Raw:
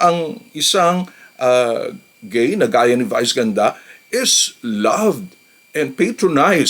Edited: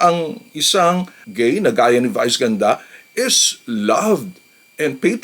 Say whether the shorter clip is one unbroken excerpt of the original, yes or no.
no